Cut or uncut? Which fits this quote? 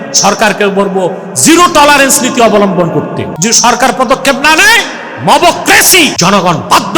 cut